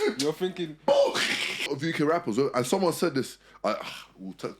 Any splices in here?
yes; 1 cut; at 1.7 s

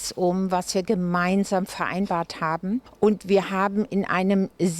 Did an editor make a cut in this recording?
yes; 1 cut; at 2.9 s

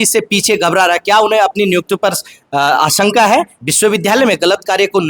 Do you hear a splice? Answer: yes; 1 cut; at 3.6 s

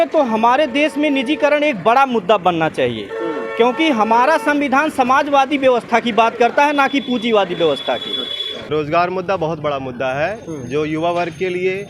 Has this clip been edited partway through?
yes; 1 cut; at 8.7 s

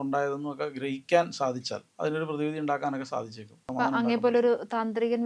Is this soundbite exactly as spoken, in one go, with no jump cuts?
no; 2 cuts; at 1.8 s, 3.6 s

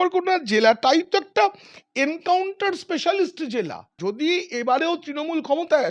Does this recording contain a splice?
yes; 1 cut; at 4.0 s

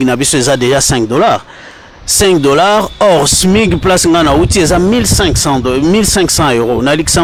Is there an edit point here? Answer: no; 0 cuts

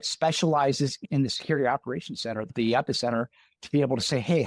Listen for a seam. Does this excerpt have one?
yes; 2 cuts; at 1.0 s, 2.5 s

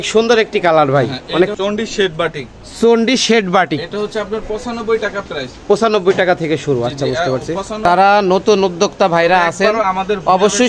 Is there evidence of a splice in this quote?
yes; 2 cuts; at 1.5 s, 7.9 s

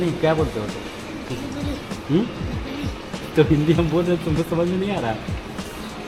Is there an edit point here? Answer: no; 0 cuts

